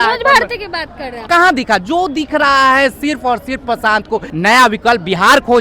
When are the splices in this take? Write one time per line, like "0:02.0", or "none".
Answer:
0:01.3
0:04.3